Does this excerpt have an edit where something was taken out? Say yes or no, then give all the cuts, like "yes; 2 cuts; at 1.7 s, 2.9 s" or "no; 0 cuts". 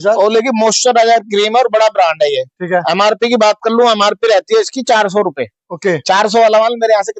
no; 0 cuts